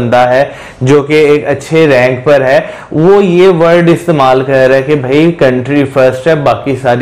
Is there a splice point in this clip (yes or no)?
no